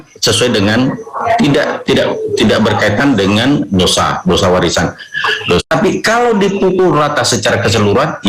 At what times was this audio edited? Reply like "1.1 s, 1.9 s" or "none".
5.6 s